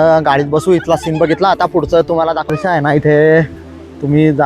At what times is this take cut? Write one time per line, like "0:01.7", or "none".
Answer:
0:02.5